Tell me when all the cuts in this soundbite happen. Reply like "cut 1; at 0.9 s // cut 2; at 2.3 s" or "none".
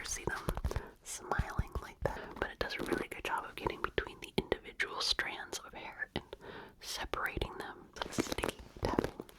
cut 1; at 2.2 s // cut 2; at 7.9 s